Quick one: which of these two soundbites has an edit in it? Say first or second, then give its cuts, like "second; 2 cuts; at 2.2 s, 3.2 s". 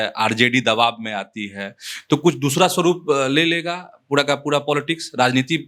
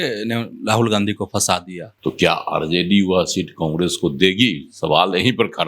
second; 1 cut; at 1.9 s